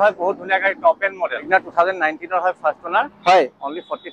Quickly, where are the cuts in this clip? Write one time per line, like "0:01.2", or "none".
0:01.5

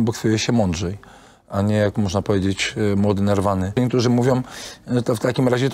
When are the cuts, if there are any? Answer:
0:03.8

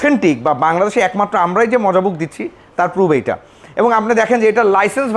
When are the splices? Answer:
none

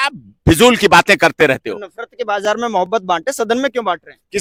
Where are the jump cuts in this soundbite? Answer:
none

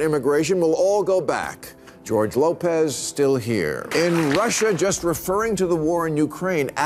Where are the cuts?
0:04.1

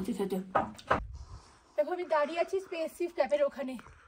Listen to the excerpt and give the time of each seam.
0:01.0

